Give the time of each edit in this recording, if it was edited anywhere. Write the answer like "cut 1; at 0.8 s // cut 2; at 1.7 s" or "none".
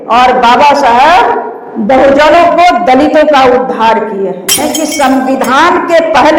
cut 1; at 4.6 s